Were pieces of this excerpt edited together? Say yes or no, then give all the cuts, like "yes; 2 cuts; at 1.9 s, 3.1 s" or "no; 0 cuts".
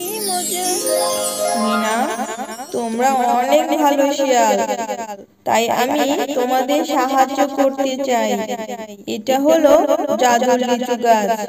yes; 2 cuts; at 0.7 s, 1.7 s